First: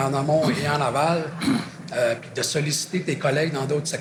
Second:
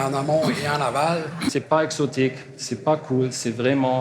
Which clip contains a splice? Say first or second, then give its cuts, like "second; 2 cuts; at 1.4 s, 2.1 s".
second; 1 cut; at 1.5 s